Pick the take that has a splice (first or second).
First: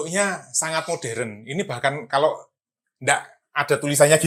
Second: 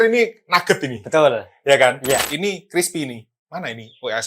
second